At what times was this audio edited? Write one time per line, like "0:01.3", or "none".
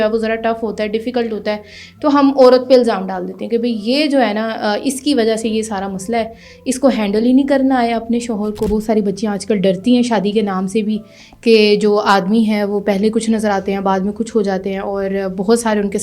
0:08.7